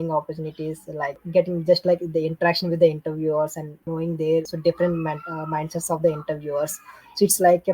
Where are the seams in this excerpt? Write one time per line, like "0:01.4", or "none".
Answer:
0:01.2
0:03.7
0:04.5